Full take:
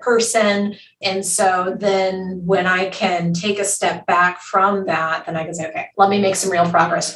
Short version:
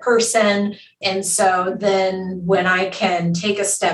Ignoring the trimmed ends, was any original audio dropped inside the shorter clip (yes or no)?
no